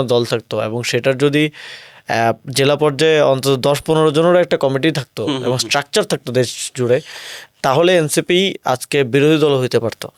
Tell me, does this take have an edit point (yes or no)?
no